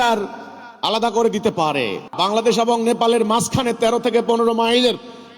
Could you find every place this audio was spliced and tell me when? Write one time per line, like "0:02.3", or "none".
0:02.0